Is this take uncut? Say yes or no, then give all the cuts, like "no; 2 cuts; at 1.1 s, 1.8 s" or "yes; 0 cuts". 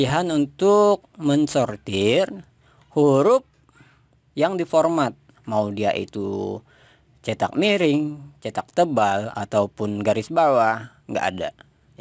yes; 0 cuts